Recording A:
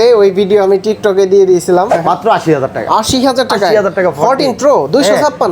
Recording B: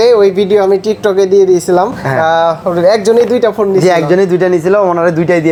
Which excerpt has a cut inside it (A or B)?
A